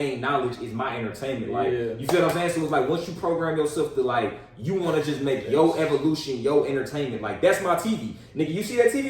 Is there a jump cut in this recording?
no; 0 cuts

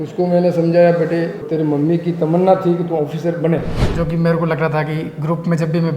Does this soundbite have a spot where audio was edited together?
yes; 2 cuts; at 1.4 s, 3.8 s

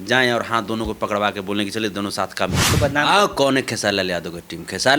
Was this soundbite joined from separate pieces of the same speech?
yes; 1 cut; at 2.7 s

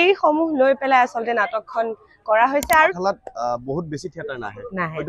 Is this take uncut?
no; 1 cut; at 2.9 s

